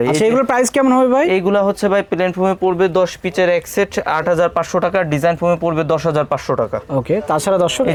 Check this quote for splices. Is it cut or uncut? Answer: uncut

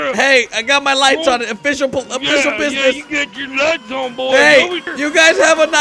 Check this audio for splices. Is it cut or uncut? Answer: cut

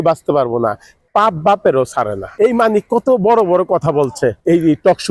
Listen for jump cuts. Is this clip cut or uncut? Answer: uncut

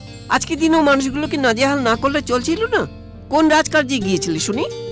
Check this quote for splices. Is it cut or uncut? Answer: uncut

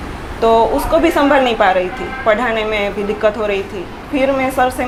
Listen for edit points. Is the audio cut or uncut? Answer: uncut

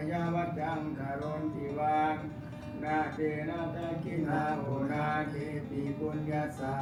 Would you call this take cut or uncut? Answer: uncut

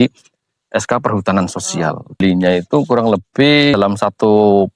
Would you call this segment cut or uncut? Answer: cut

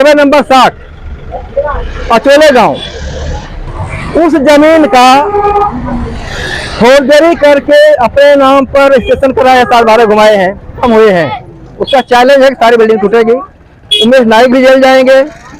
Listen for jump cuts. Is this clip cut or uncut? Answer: cut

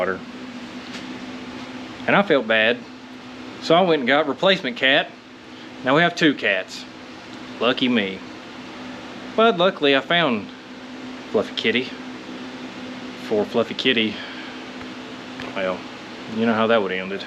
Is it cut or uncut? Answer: uncut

